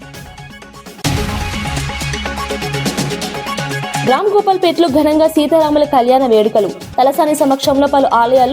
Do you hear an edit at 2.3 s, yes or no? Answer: no